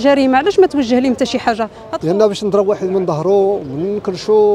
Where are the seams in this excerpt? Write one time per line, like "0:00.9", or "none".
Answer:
0:01.9